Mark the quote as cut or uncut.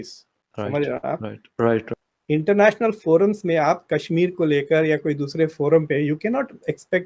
uncut